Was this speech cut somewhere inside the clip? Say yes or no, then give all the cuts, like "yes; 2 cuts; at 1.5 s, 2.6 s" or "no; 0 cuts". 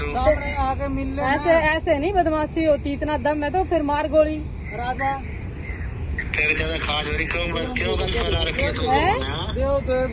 no; 0 cuts